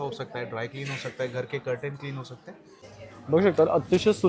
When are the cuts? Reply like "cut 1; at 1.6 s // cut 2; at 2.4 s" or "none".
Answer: cut 1; at 2.8 s